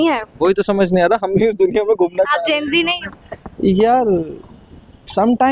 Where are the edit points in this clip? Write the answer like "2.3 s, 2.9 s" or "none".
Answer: none